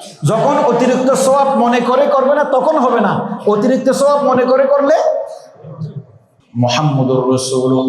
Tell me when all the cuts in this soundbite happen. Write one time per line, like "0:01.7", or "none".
0:06.3

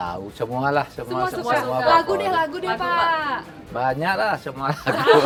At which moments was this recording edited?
none

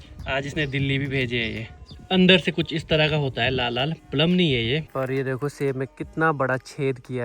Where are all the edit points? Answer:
0:01.8
0:04.9

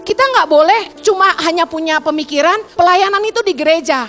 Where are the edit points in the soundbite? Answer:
0:00.9
0:02.7

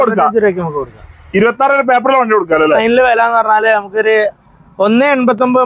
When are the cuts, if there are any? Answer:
0:02.8

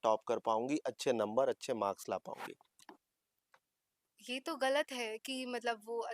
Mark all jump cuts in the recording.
0:02.7

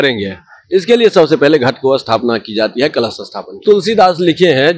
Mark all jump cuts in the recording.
0:03.6

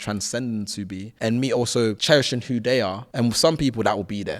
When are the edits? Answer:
0:01.0
0:02.0
0:03.0

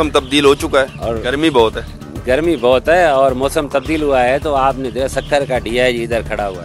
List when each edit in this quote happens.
0:01.0

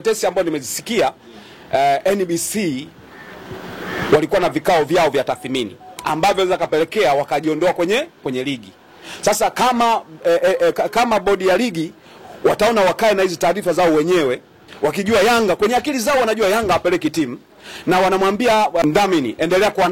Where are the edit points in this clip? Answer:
0:18.8

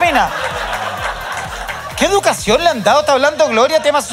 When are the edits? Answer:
none

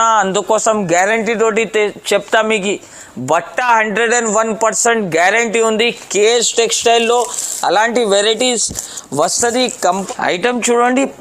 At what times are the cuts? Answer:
0:10.0

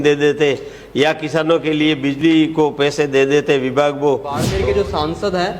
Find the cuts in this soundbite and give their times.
0:04.4

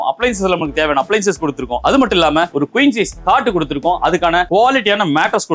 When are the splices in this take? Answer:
0:01.7
0:02.5
0:04.5

